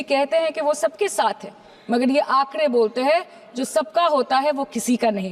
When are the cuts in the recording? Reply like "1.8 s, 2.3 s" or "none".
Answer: none

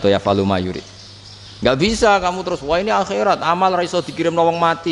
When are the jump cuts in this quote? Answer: none

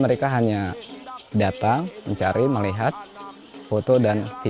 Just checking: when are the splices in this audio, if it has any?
none

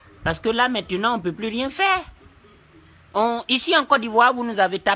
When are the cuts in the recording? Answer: none

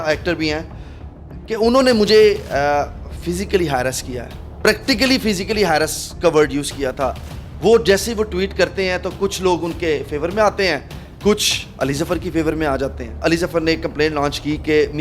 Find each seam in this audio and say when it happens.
13.2 s

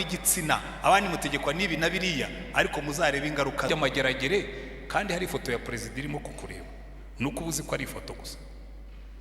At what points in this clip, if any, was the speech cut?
3.7 s

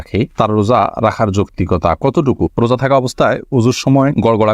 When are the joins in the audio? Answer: 2.5 s

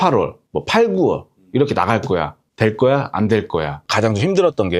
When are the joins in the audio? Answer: 3.8 s

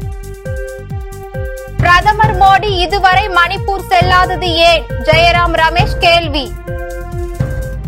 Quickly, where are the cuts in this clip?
1.0 s

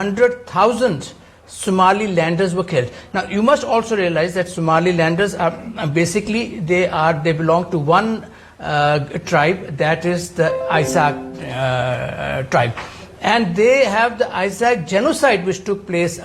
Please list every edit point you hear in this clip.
none

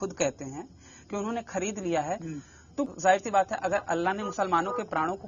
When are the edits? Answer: 2.9 s

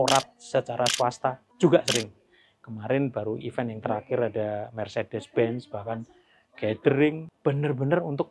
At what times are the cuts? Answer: 7.3 s

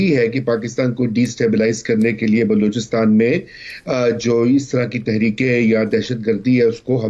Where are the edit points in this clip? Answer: none

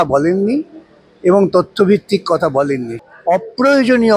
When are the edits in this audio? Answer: 3.0 s

